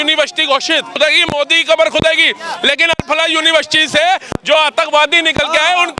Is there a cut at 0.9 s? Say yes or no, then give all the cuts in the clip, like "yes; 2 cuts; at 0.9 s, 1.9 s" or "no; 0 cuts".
yes; 1 cut; at 0.9 s